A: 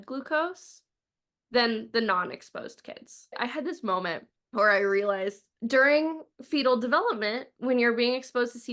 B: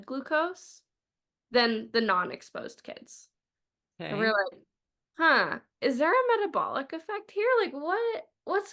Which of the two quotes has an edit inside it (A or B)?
A